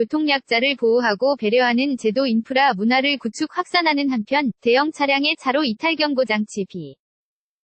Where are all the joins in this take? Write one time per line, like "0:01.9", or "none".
none